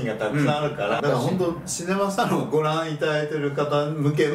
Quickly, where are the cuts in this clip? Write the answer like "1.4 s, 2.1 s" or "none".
1.0 s